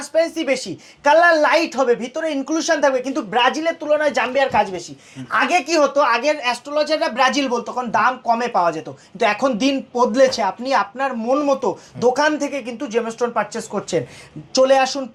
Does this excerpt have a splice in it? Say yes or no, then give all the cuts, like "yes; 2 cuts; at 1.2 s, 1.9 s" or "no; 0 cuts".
no; 0 cuts